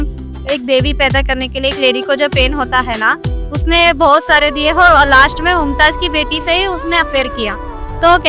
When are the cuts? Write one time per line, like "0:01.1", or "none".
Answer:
none